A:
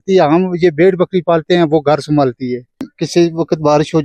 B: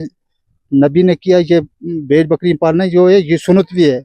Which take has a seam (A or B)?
A